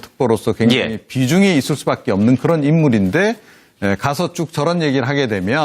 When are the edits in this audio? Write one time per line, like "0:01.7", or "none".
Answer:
0:04.5